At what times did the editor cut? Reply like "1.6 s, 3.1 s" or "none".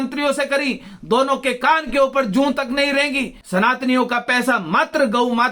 3.4 s